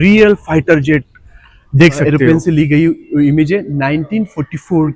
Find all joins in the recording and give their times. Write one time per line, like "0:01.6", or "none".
0:02.0